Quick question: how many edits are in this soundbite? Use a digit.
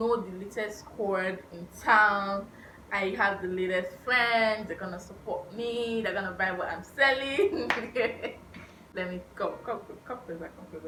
0